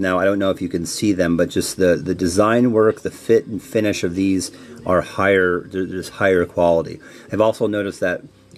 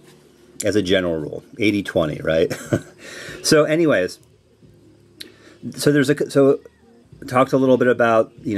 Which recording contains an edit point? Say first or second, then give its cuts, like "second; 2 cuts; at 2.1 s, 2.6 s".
first; 1 cut; at 3.3 s